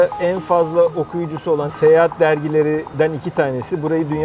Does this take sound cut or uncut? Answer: cut